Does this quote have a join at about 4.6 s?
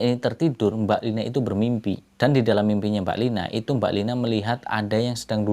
no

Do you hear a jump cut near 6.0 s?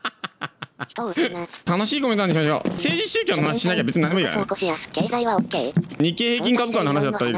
yes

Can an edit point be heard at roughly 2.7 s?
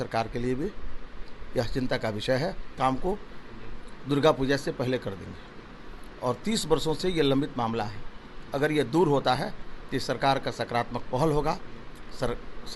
yes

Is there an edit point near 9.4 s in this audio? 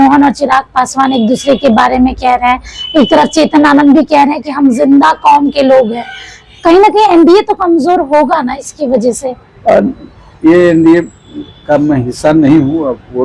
no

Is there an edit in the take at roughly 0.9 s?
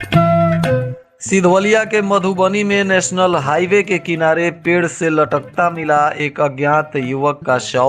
yes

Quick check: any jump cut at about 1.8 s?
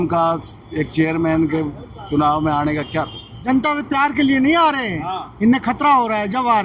no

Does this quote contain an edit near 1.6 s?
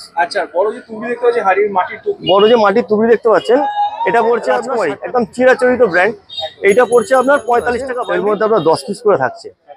no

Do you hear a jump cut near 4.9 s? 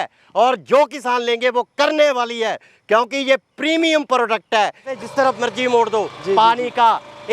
yes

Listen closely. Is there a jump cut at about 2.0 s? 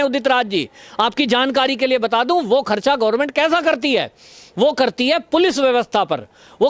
no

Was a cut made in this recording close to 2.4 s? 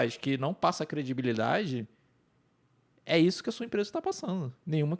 no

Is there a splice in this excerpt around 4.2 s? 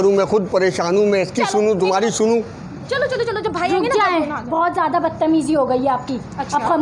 no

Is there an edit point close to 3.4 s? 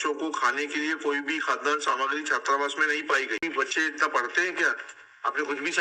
yes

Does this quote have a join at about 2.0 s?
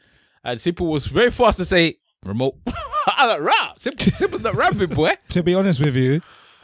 no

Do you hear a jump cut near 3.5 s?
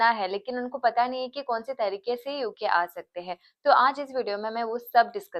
no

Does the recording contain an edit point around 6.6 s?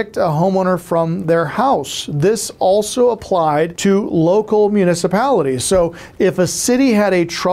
no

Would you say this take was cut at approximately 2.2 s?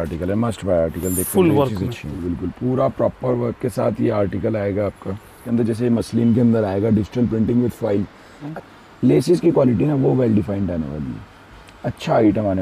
yes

